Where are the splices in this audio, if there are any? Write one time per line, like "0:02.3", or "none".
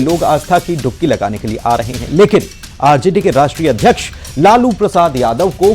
0:01.5